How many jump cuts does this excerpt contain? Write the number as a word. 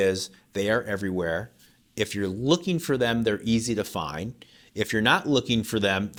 zero